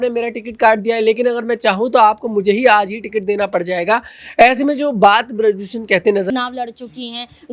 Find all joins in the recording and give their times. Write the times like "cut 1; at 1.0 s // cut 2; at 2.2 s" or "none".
cut 1; at 6.3 s

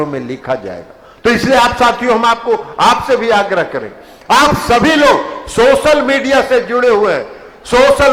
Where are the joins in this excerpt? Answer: none

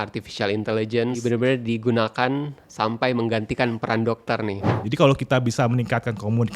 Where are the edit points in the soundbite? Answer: cut 1; at 1.2 s // cut 2; at 4.8 s

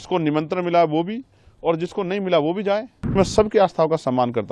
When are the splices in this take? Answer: cut 1; at 3.2 s

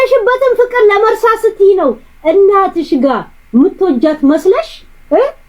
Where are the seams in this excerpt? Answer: none

